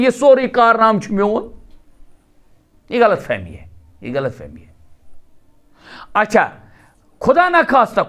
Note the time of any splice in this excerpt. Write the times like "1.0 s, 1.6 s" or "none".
none